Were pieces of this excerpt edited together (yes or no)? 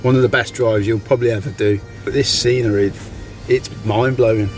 yes